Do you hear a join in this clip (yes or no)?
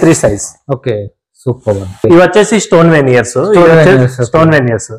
yes